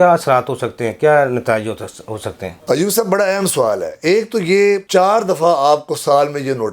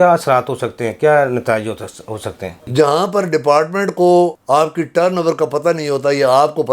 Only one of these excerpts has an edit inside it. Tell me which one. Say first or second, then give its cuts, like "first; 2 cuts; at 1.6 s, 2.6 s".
second; 1 cut; at 2.5 s